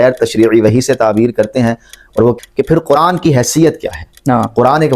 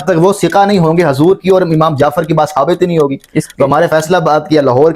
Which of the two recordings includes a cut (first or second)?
first